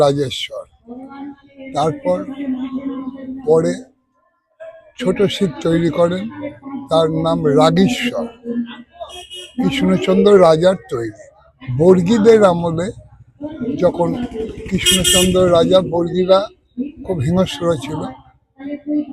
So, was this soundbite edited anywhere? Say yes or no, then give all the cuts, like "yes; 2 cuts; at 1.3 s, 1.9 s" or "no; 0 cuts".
no; 0 cuts